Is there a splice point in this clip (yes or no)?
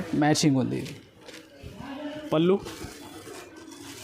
yes